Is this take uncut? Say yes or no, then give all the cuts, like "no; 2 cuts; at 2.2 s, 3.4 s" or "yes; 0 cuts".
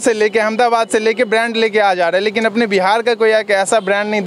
yes; 0 cuts